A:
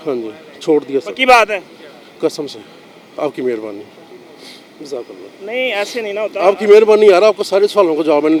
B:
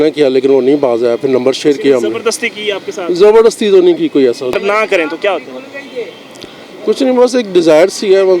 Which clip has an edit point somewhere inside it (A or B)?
B